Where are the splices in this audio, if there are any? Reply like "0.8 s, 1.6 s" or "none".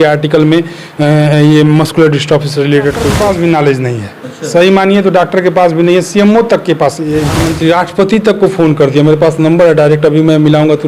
3.1 s, 7.4 s